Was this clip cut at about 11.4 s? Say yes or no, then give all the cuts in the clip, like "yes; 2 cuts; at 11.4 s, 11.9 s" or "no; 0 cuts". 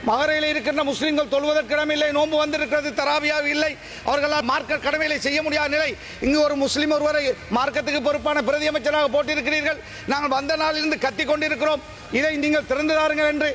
no; 1 cut; at 4.4 s